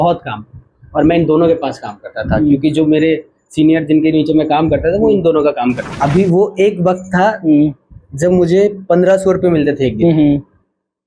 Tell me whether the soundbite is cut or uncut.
cut